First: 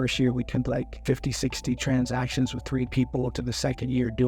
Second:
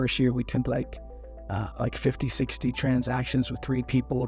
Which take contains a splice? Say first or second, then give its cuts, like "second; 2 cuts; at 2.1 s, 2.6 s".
first; 1 cut; at 1.0 s